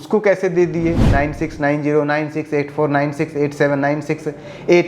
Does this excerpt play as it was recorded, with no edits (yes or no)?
no